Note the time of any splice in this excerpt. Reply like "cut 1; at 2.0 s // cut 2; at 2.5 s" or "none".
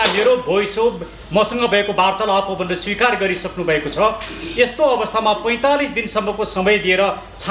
none

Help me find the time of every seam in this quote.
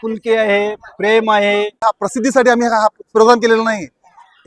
cut 1; at 1.8 s

